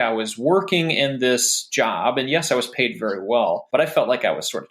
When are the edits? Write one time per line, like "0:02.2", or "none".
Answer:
0:03.6